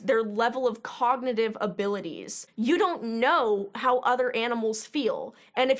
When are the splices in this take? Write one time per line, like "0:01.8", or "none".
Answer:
0:02.3